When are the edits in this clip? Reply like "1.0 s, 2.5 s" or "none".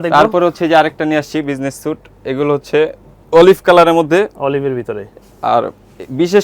none